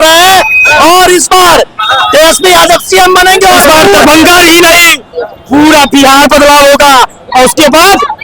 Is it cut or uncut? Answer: cut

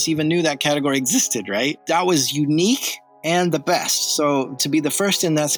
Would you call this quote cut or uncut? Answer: cut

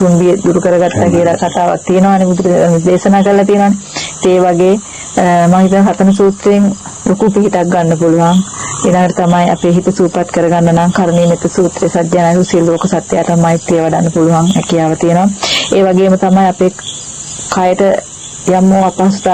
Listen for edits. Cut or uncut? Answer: uncut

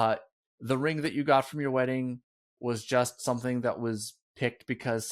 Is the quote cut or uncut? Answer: uncut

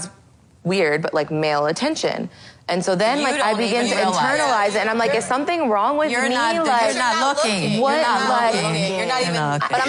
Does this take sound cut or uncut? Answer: uncut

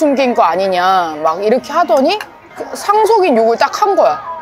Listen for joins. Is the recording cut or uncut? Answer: uncut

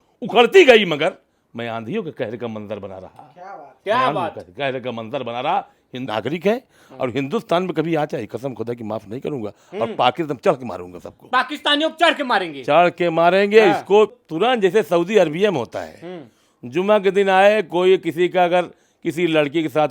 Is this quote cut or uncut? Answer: cut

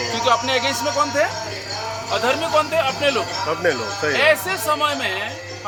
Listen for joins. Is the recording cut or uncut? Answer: uncut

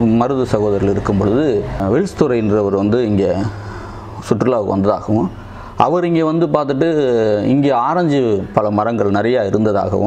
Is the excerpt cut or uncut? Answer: cut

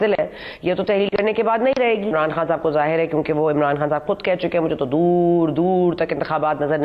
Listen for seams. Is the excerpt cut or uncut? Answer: cut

